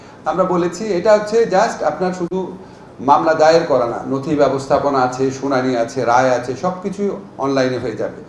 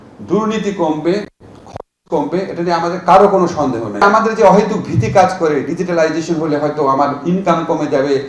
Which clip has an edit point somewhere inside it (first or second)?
second